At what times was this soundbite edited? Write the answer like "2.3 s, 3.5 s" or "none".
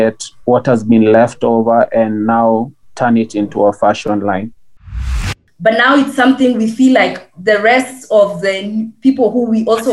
5.0 s